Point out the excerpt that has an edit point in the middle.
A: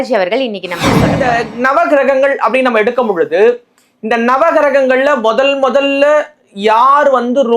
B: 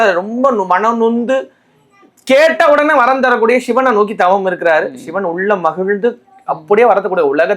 A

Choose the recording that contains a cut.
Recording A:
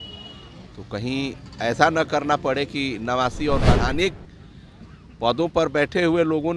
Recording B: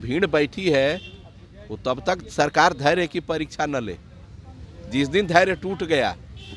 A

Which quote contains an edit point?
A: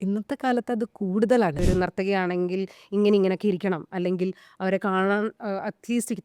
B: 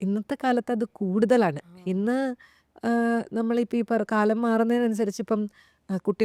A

